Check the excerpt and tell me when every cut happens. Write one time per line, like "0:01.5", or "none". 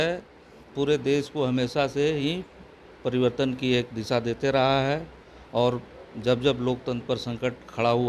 none